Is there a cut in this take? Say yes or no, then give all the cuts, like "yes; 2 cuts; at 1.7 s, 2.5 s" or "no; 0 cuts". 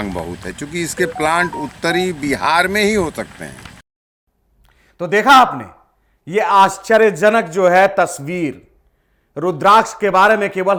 no; 0 cuts